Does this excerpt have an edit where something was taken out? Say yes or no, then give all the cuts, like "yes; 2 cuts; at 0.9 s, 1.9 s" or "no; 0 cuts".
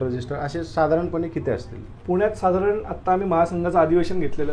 no; 0 cuts